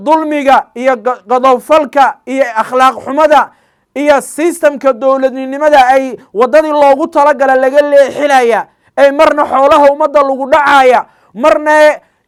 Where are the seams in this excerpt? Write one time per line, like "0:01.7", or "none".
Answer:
none

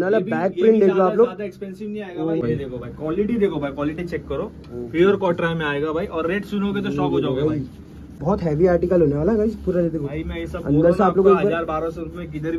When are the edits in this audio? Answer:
0:02.4
0:08.2

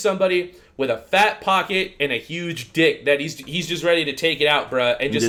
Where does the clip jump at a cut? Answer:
none

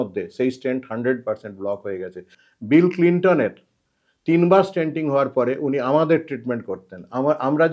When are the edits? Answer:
0:02.3

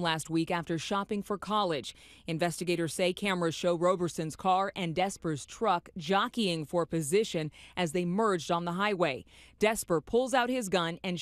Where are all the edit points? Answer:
0:10.3

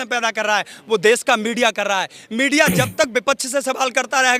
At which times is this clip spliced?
none

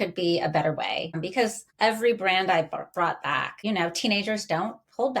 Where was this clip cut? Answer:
0:01.3
0:03.5

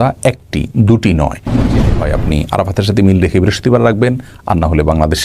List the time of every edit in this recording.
0:01.8

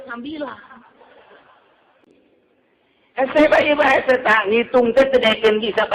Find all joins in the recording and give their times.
0:02.0

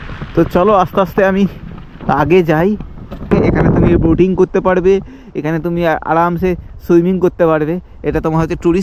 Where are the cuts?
0:03.3

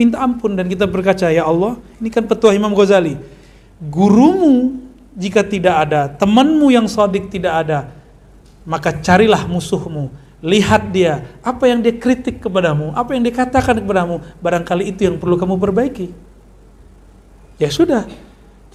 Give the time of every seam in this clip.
none

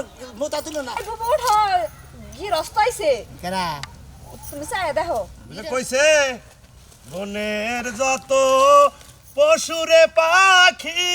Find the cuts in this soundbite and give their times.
0:01.1

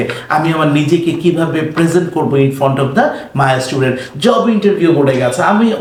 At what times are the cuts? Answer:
none

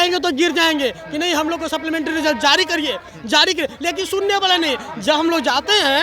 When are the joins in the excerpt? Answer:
none

